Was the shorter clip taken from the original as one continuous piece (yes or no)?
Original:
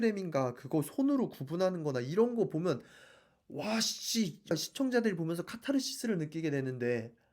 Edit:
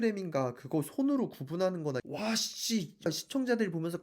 no